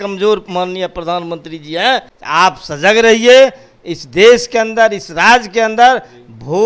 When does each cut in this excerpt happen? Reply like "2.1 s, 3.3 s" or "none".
2.2 s